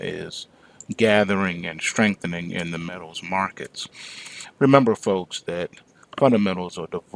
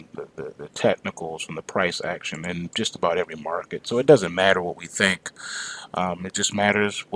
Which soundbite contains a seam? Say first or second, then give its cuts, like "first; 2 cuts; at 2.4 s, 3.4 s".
second; 1 cut; at 6.0 s